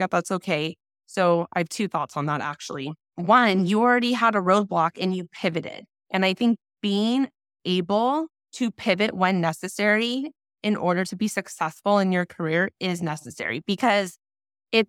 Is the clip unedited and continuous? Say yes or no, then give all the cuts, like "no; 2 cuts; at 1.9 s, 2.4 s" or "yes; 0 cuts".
no; 2 cuts; at 3.0 s, 8.4 s